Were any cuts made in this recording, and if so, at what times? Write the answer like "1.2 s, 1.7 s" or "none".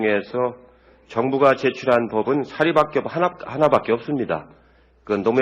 none